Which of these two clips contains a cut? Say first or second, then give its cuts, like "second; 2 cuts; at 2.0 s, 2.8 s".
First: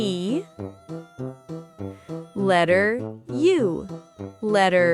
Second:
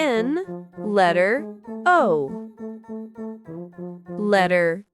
second; 2 cuts; at 2.6 s, 4.2 s